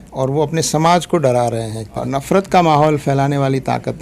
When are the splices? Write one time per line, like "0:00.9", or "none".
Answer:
0:02.0